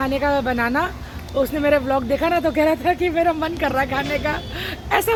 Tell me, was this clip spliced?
no; 0 cuts

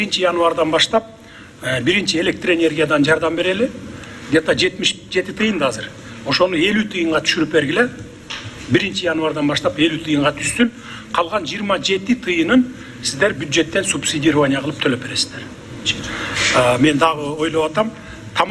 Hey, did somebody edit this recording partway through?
yes; 1 cut; at 16.0 s

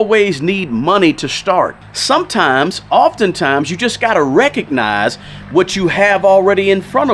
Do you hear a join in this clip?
no; 0 cuts

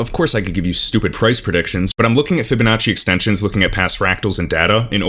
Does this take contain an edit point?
no; 0 cuts

